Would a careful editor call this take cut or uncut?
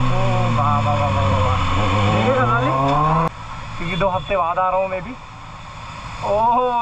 cut